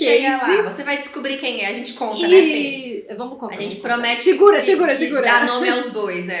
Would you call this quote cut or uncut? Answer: uncut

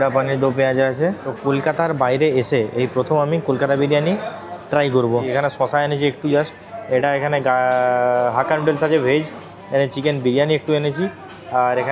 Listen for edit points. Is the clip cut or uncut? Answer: cut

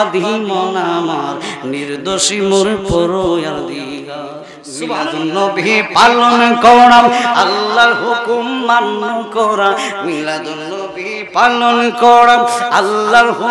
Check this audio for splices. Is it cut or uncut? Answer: cut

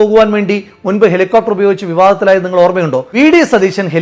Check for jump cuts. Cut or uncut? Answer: cut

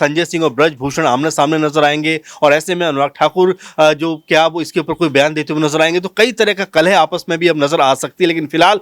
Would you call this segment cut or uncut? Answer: uncut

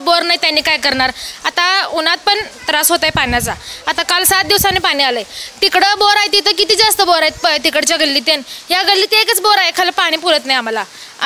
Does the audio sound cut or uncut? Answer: uncut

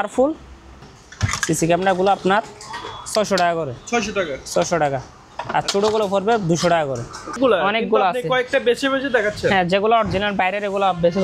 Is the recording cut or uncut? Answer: cut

